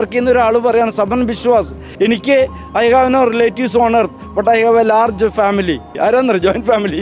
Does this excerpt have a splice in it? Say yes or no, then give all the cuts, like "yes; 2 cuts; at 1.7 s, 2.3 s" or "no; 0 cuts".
yes; 2 cuts; at 1.8 s, 5.9 s